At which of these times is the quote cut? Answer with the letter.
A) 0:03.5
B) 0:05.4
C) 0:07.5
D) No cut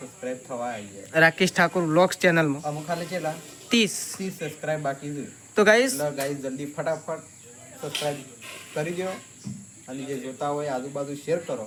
D